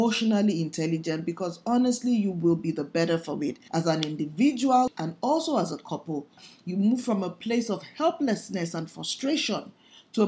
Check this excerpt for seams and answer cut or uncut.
cut